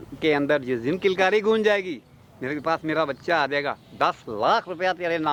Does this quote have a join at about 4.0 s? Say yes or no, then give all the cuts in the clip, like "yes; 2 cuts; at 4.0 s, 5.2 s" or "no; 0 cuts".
no; 0 cuts